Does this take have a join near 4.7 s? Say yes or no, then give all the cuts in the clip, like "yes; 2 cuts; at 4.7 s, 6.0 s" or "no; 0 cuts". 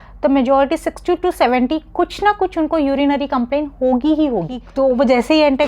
yes; 1 cut; at 4.7 s